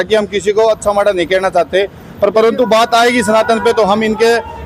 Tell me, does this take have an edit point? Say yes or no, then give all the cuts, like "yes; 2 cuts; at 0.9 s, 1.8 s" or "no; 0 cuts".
no; 0 cuts